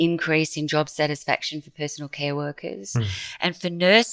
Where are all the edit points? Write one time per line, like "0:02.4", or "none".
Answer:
0:03.0

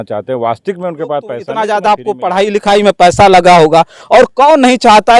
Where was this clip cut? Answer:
0:01.5

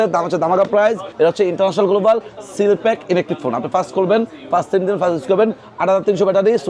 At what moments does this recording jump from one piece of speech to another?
0:01.1

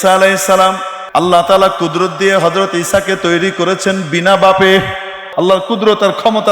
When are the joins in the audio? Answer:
0:00.9
0:05.2

